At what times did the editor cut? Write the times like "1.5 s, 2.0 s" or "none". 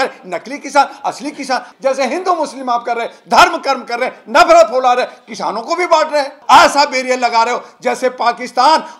1.7 s, 6.4 s